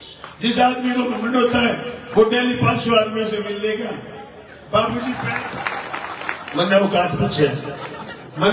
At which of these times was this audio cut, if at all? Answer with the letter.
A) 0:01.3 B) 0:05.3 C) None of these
B